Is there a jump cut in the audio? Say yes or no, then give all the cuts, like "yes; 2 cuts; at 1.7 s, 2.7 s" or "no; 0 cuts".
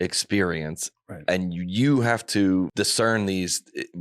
yes; 1 cut; at 2.7 s